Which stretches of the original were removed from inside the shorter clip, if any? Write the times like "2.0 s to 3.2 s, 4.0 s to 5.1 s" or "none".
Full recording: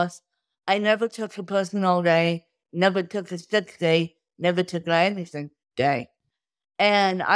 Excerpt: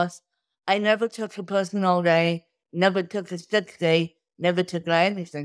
none